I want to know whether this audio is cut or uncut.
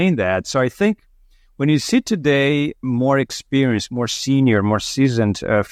uncut